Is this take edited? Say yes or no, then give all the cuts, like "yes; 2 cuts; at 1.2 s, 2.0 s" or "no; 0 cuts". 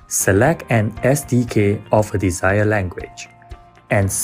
no; 0 cuts